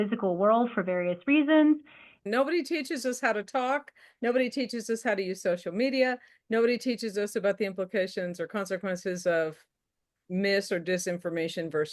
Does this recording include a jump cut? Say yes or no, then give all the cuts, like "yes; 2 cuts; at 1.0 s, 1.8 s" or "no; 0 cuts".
yes; 1 cut; at 2.2 s